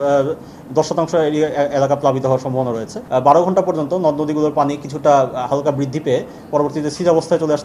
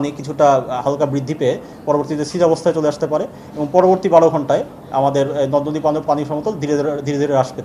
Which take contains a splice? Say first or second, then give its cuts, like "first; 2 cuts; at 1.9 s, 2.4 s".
first; 1 cut; at 2.9 s